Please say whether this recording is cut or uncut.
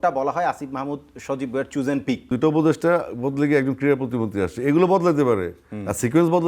cut